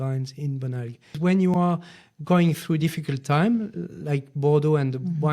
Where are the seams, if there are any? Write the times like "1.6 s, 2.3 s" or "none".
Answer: 1.1 s

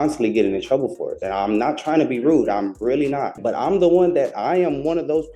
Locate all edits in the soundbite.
3.3 s

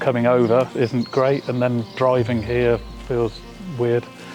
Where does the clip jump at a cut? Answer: none

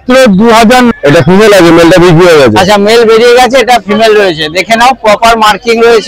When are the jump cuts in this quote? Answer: 0.9 s

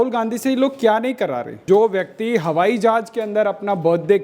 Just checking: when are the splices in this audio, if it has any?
1.6 s

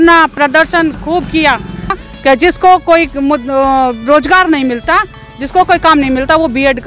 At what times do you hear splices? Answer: 1.9 s

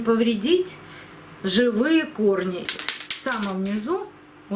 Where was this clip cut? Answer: 2.6 s

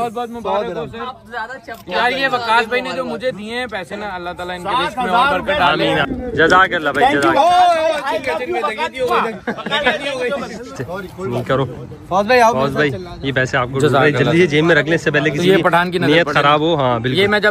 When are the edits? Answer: 6.1 s, 10.8 s

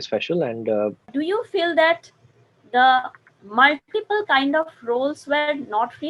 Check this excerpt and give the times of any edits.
1.1 s

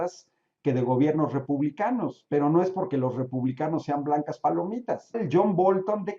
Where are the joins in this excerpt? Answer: 5.2 s

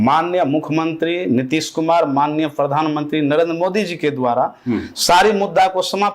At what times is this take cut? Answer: none

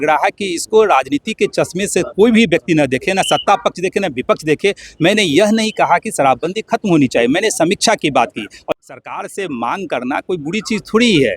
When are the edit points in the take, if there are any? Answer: 8.7 s

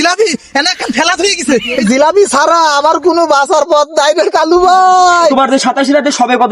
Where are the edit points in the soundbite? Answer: 1.8 s, 5.3 s

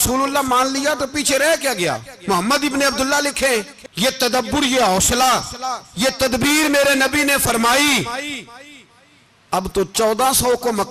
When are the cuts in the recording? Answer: 3.8 s

